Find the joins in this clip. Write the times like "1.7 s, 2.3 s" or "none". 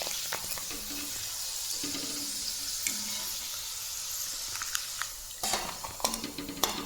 none

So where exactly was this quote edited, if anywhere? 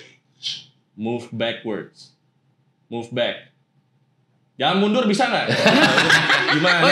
none

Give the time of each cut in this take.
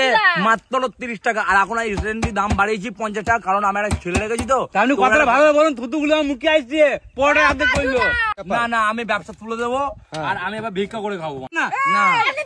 8.4 s, 11.6 s

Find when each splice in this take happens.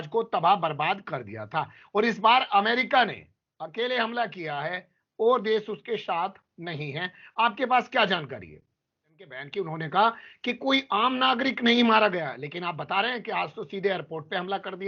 9.4 s

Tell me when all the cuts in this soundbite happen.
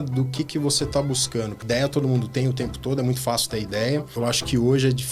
1.6 s, 4.1 s

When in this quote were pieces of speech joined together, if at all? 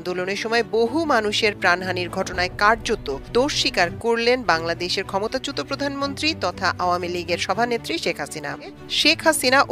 8.8 s

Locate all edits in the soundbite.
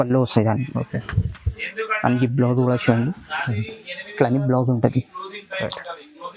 none

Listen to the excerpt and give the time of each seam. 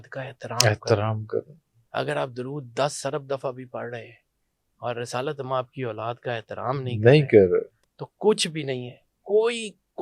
none

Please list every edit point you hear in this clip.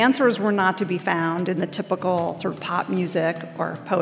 none

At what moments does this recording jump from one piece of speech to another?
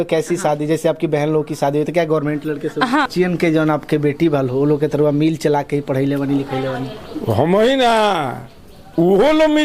3.1 s

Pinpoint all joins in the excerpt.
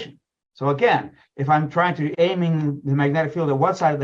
2.1 s

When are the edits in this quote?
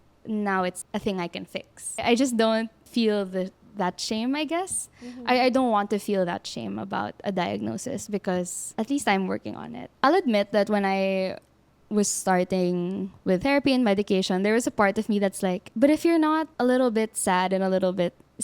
2.0 s, 9.9 s

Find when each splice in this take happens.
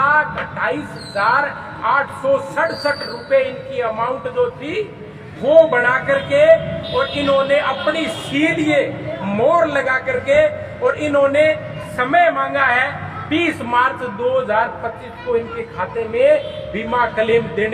none

